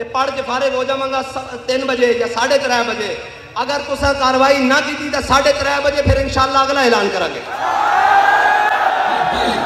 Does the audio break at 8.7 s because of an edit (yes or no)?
no